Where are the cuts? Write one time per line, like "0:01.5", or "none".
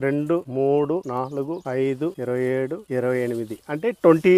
0:02.2